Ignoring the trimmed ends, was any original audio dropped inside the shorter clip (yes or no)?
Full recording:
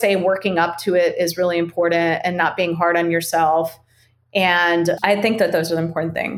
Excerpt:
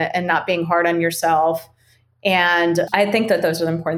no